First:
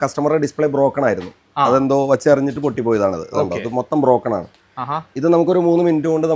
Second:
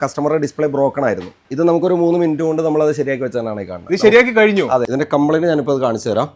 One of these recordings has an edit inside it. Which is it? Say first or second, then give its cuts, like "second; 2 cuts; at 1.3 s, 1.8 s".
second; 2 cuts; at 1.4 s, 4.9 s